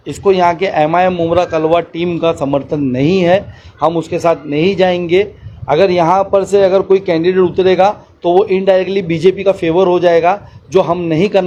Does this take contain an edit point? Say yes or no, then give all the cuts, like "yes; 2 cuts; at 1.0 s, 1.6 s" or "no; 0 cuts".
no; 0 cuts